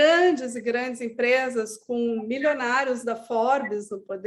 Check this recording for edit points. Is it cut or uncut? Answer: uncut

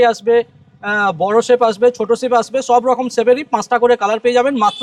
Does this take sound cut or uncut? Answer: uncut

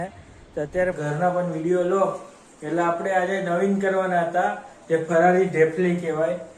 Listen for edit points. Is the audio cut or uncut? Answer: cut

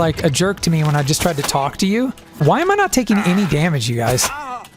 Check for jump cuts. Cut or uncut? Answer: cut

